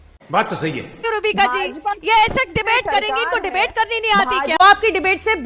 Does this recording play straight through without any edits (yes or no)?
no